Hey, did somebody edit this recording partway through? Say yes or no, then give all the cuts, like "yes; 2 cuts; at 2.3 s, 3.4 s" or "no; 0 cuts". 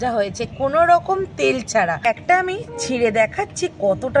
yes; 1 cut; at 2.1 s